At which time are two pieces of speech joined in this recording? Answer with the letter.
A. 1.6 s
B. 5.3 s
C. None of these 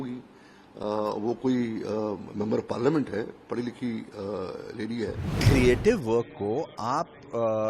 B